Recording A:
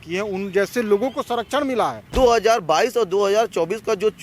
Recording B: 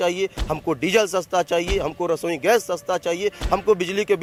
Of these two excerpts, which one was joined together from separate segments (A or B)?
A